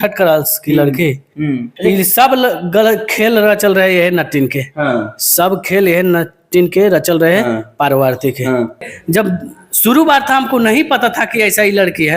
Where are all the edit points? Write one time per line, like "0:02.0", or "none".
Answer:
0:01.7
0:08.9